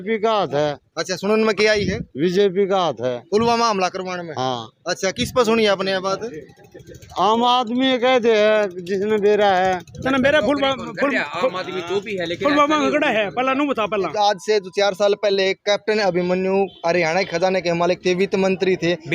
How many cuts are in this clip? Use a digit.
1